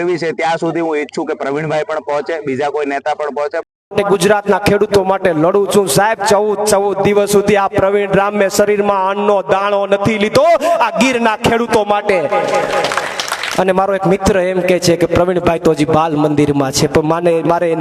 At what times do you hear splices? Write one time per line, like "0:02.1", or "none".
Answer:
0:03.8